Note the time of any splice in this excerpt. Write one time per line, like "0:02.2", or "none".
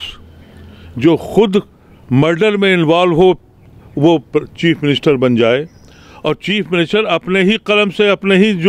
none